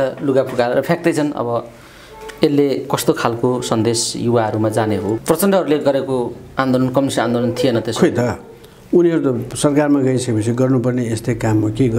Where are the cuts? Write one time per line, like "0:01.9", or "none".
0:05.2